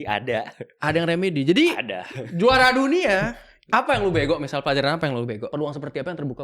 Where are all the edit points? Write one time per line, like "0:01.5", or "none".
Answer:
0:05.5